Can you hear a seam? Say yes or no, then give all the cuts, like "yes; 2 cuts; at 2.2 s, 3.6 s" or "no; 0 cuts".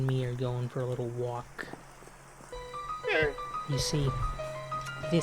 yes; 1 cut; at 2.5 s